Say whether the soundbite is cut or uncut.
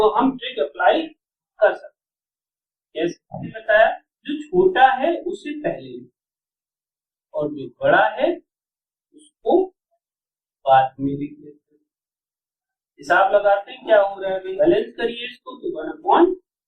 cut